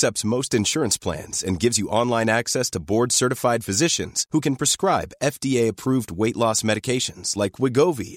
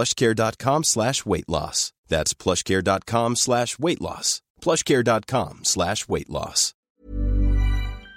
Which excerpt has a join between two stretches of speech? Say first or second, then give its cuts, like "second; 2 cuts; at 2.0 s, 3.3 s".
second; 1 cut; at 6.9 s